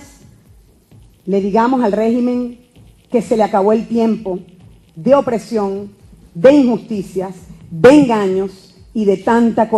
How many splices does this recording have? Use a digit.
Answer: 1